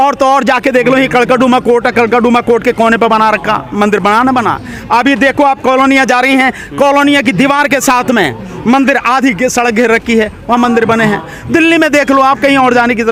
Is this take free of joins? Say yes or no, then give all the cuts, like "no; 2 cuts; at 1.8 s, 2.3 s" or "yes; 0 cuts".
yes; 0 cuts